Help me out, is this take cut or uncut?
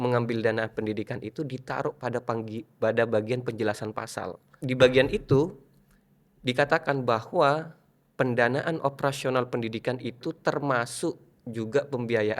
cut